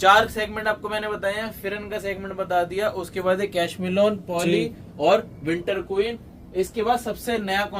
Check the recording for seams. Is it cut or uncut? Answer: uncut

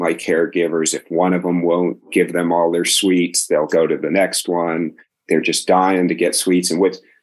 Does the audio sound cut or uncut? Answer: cut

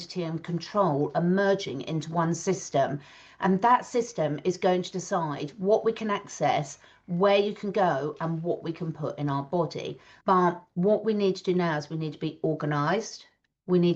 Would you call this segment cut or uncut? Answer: cut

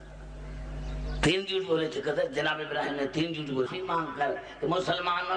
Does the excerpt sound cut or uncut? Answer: uncut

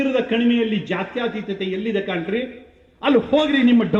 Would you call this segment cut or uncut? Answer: uncut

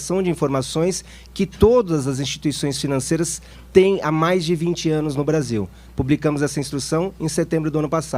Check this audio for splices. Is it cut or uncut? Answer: cut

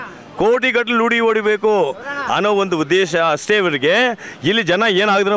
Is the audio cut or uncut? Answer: uncut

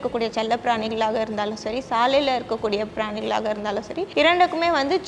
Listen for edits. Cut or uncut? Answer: cut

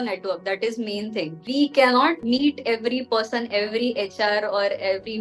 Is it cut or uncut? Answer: cut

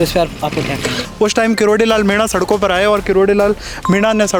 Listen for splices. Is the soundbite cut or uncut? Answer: cut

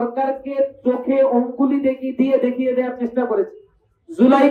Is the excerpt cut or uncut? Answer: uncut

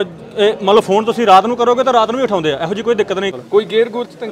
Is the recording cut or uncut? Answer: cut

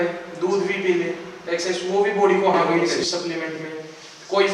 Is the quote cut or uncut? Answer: cut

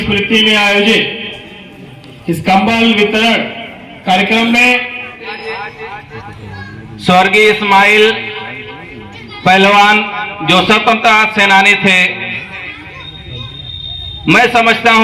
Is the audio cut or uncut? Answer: cut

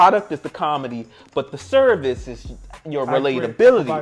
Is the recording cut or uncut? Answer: uncut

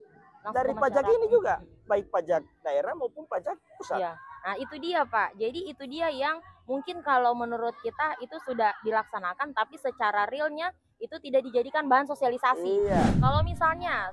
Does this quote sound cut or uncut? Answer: cut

